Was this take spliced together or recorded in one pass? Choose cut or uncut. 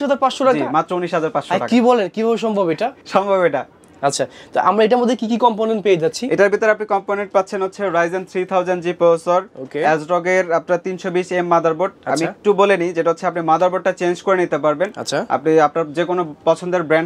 uncut